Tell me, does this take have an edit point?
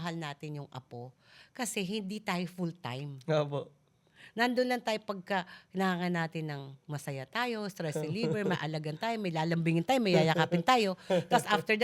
no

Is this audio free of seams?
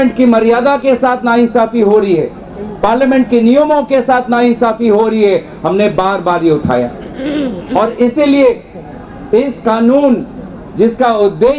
yes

